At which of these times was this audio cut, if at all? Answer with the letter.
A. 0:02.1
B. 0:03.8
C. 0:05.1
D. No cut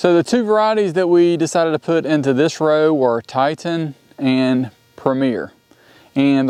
D